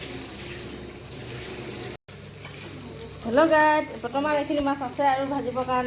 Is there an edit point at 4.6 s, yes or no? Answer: no